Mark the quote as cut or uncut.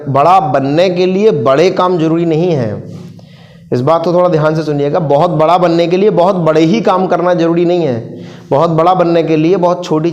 uncut